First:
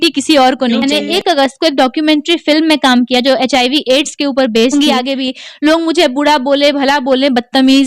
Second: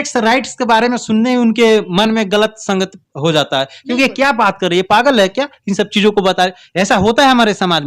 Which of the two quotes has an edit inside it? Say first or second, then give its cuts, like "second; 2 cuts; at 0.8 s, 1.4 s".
first; 2 cuts; at 0.8 s, 4.7 s